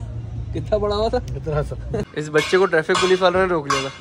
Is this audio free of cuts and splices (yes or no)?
no